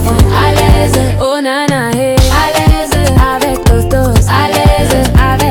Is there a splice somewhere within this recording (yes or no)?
no